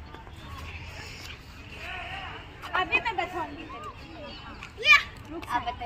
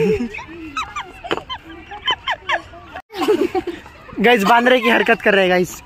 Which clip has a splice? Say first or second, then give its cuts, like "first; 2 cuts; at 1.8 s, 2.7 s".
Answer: second; 1 cut; at 3.1 s